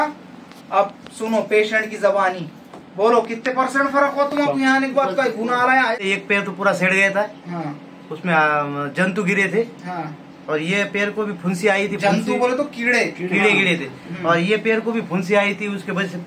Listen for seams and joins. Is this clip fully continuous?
no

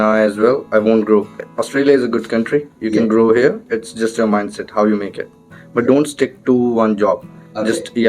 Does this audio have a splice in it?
yes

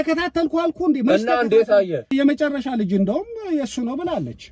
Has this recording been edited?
yes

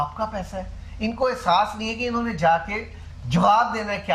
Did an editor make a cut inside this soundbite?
no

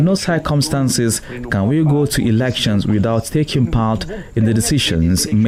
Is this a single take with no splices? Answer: yes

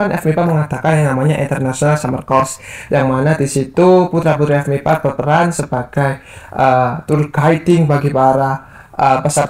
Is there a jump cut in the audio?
no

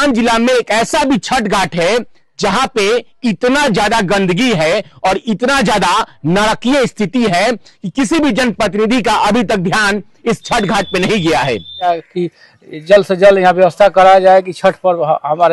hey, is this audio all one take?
no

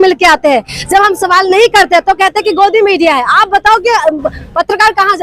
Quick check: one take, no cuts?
yes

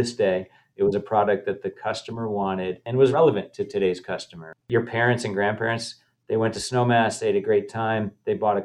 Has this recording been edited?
yes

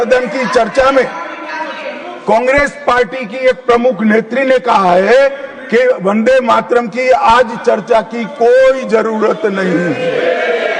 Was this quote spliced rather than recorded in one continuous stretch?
no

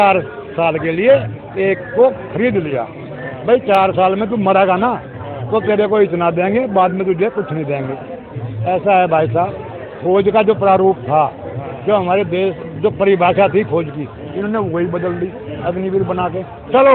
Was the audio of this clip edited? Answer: no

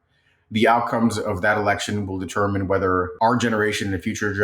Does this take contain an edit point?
yes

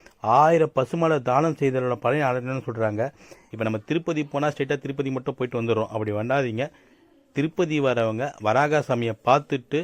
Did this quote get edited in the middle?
yes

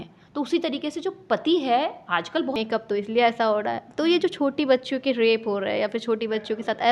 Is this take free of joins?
no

